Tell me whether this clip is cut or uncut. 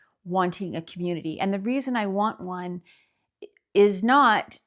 uncut